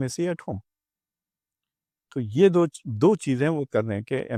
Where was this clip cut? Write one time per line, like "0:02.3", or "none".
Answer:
none